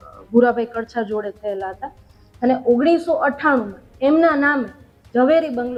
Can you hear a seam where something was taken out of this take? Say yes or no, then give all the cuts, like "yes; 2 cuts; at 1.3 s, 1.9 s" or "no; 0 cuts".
no; 0 cuts